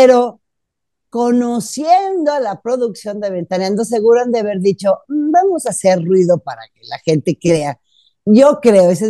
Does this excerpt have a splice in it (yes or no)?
no